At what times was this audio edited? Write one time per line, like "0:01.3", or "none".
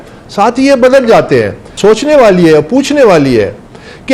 0:01.7

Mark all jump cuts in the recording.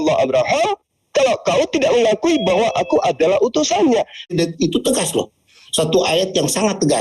0:04.3

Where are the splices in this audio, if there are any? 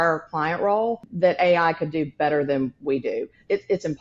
0:01.1

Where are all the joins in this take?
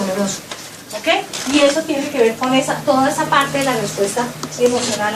0:02.0

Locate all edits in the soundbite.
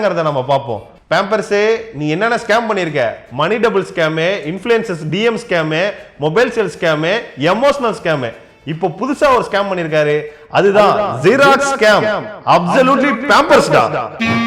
0:00.9

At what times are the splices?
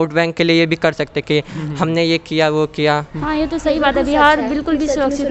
0:03.1

